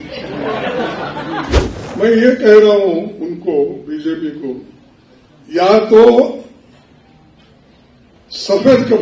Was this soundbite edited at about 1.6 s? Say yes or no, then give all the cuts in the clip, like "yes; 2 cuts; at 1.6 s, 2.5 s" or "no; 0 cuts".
yes; 1 cut; at 1.6 s